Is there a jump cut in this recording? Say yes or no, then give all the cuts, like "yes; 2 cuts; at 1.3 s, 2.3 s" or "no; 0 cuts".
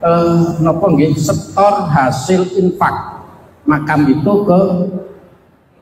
no; 0 cuts